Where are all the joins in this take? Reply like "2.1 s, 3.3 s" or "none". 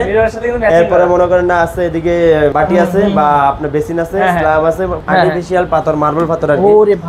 2.5 s, 5.0 s